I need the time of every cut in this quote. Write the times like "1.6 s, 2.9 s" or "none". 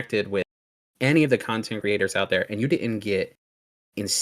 1.7 s